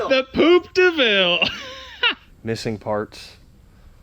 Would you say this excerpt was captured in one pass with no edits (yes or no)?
no